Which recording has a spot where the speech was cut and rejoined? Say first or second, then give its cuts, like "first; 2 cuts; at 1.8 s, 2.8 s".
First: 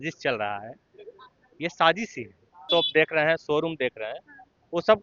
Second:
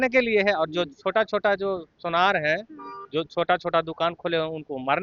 first; 1 cut; at 2.7 s